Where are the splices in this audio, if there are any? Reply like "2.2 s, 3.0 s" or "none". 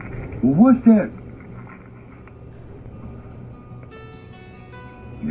none

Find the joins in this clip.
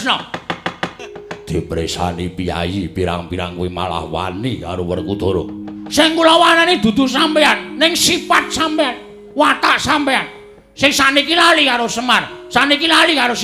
0.9 s

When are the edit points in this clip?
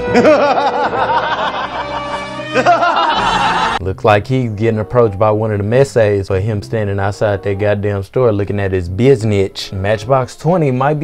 3.8 s

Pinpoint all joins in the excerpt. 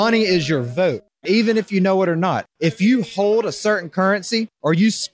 1.1 s

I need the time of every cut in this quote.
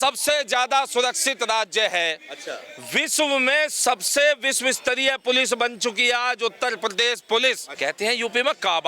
7.7 s

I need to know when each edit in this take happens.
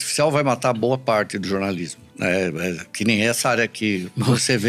none

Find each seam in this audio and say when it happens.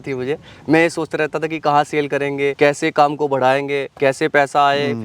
2.5 s, 3.9 s

